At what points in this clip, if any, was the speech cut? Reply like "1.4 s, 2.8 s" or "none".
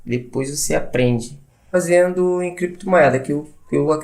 1.7 s